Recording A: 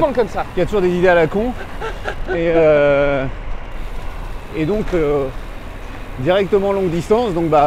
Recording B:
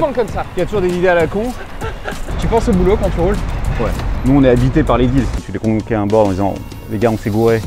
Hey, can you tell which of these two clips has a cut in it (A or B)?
B